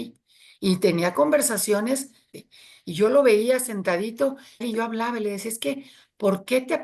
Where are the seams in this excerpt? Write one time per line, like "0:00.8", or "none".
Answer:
0:02.4
0:04.6